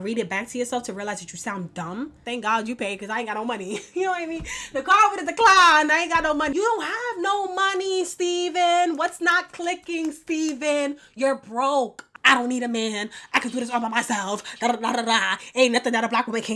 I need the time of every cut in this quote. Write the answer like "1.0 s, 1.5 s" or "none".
2.2 s, 6.5 s, 12.0 s